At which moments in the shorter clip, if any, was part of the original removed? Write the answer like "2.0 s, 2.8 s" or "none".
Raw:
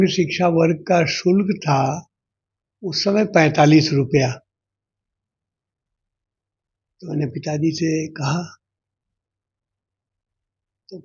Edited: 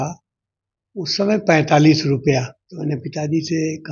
2.6 s